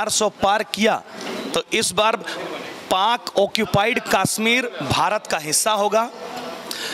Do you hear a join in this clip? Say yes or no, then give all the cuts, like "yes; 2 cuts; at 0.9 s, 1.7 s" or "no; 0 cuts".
no; 0 cuts